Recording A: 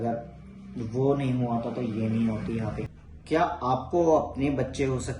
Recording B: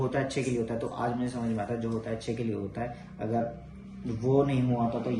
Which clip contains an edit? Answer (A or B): A